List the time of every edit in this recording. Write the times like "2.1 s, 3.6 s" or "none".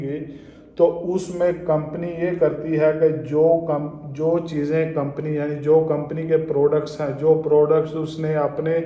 none